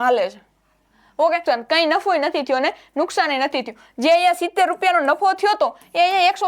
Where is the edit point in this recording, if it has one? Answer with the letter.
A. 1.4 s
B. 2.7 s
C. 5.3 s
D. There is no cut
A